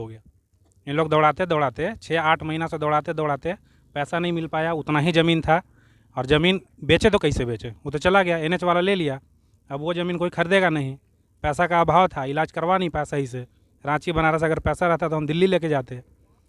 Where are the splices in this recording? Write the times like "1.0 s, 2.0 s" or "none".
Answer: none